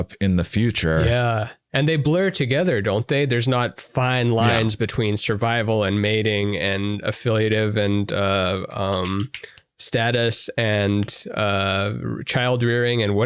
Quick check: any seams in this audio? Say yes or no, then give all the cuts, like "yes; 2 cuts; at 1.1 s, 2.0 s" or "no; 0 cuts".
no; 0 cuts